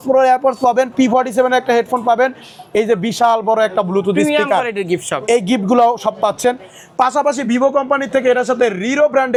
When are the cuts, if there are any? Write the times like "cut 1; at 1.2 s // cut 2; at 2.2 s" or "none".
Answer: none